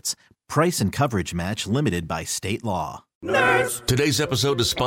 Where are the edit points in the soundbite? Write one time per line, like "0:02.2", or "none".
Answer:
0:03.1